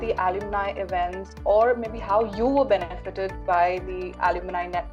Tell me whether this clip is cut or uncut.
uncut